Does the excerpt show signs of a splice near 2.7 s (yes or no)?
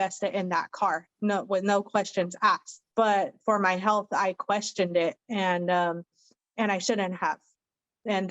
yes